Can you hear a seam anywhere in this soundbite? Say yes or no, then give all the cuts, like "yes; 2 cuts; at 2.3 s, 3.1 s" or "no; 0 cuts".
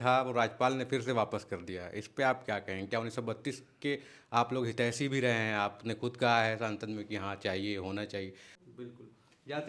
yes; 1 cut; at 8.6 s